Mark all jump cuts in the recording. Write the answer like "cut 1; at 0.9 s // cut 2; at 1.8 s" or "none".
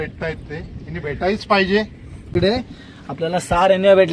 cut 1; at 2.3 s